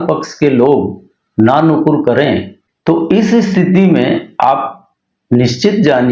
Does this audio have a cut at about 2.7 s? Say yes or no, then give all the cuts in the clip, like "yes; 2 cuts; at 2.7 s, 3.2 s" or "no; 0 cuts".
yes; 1 cut; at 2.7 s